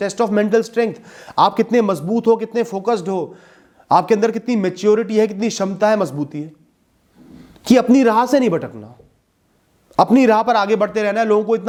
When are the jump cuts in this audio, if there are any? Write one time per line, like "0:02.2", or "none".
none